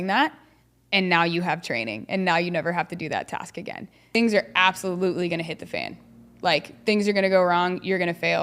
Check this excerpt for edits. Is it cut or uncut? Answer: cut